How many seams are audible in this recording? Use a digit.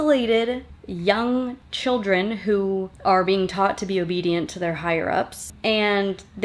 1